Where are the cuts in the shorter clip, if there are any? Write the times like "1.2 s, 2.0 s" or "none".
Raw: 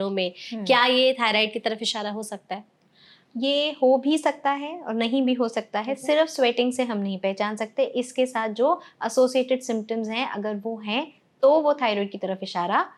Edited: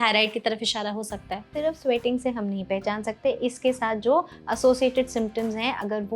1.5 s